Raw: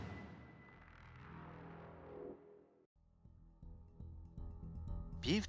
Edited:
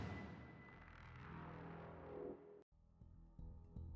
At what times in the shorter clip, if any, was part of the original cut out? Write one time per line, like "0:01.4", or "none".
0:02.7